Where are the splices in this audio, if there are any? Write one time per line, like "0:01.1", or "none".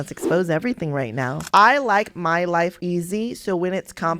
0:01.4